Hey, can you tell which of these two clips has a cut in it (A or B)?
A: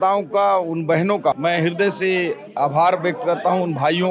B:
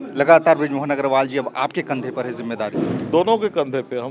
A